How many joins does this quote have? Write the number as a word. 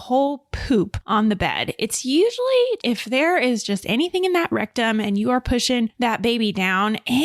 two